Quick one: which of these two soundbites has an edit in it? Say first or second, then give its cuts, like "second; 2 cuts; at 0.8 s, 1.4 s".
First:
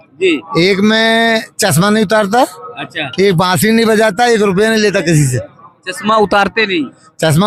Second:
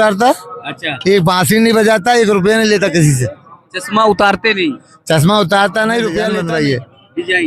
second; 1 cut; at 6.3 s